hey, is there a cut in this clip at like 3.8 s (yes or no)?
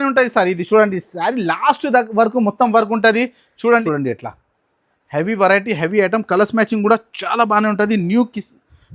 yes